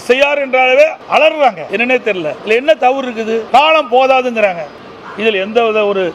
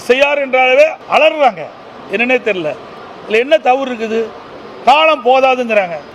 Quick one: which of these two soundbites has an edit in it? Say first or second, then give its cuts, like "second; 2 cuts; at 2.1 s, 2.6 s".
first; 2 cuts; at 2.0 s, 3.4 s